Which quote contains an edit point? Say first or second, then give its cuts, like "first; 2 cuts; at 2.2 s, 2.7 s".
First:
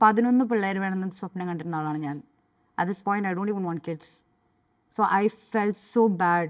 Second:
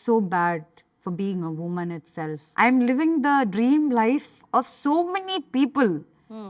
second; 1 cut; at 2.4 s